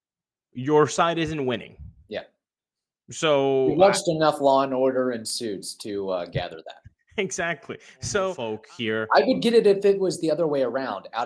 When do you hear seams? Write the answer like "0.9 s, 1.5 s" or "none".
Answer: 8.4 s